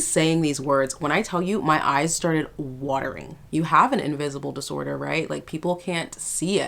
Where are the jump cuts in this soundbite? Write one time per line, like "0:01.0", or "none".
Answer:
0:03.4